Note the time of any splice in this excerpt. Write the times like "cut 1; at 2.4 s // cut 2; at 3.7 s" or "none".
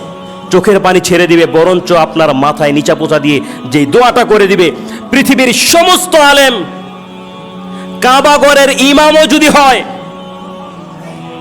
cut 1; at 6.7 s // cut 2; at 8.0 s